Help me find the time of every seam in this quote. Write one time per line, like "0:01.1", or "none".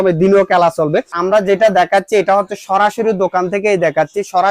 0:01.2